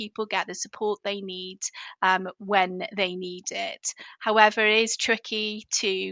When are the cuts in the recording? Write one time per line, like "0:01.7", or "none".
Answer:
none